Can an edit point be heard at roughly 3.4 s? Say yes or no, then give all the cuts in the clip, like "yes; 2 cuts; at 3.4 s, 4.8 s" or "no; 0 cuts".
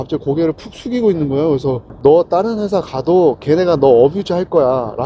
no; 1 cut; at 1.9 s